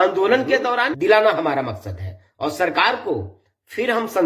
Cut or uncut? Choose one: cut